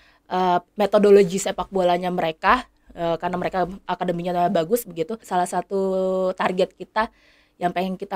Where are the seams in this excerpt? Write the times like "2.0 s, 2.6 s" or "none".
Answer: 5.2 s